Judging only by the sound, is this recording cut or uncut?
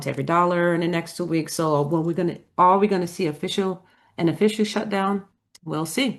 uncut